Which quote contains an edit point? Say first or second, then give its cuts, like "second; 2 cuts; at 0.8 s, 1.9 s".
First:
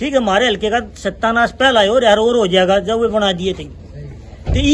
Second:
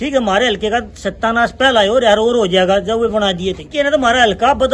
second; 1 cut; at 3.7 s